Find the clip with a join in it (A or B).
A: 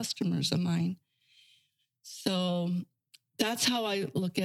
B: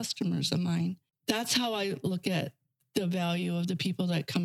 B